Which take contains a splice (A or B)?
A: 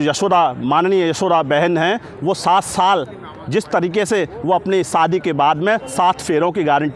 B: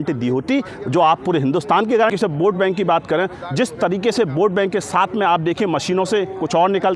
B